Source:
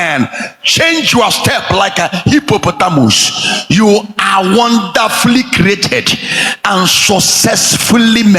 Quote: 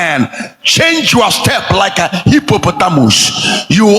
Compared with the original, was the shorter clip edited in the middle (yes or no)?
no